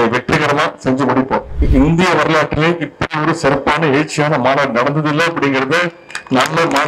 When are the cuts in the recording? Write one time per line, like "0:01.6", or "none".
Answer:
0:01.6